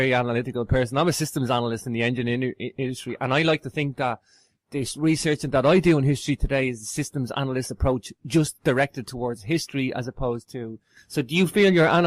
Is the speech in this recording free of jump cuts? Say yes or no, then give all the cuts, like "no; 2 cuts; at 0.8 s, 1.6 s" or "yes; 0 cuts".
yes; 0 cuts